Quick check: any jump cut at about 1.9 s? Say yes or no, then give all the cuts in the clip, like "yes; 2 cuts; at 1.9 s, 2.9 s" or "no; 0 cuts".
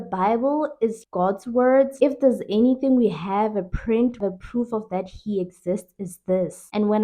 yes; 3 cuts; at 1.0 s, 1.9 s, 4.2 s